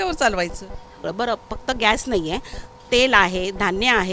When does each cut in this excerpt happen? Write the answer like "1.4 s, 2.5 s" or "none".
1.0 s